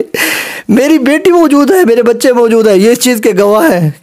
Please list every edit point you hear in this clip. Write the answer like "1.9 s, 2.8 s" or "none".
none

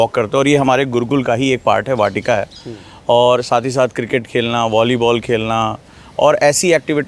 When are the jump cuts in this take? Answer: none

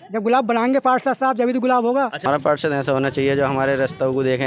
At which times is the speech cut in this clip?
2.2 s

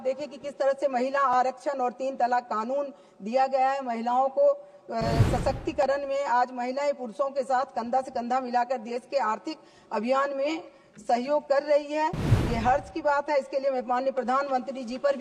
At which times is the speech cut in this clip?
none

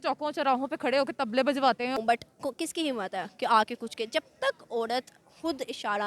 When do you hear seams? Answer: 2.0 s

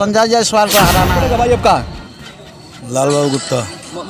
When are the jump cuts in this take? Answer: 1.2 s

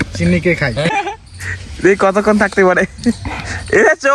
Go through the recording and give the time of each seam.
0.9 s

